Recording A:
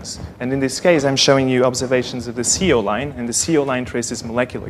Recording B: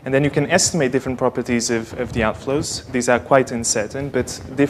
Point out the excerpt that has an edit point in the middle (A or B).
A